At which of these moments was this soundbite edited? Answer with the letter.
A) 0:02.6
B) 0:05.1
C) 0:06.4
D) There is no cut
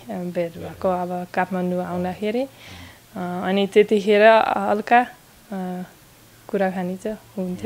D